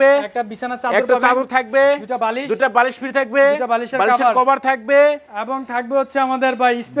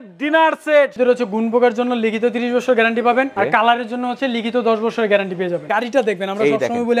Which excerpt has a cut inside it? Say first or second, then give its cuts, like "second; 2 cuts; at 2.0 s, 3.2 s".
second; 2 cuts; at 0.9 s, 5.6 s